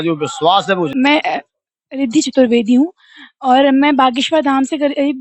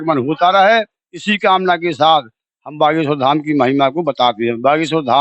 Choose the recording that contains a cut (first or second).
first